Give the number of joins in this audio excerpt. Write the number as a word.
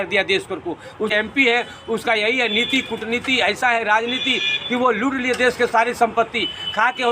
one